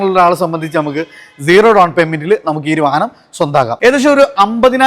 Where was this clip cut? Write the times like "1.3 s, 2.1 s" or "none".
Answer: 3.7 s